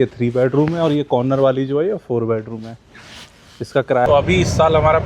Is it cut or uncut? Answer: cut